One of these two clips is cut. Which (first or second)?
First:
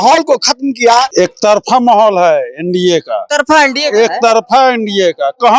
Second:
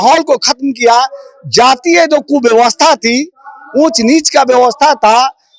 first